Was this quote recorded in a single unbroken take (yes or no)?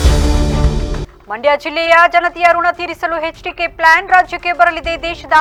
yes